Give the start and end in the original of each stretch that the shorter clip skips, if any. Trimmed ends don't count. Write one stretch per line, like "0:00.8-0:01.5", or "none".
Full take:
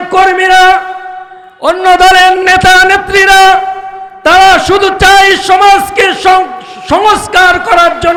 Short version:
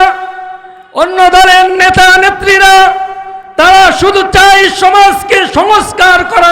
0:06.2-0:06.8